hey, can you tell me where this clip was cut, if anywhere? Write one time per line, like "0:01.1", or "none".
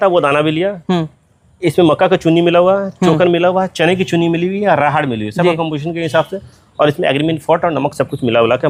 none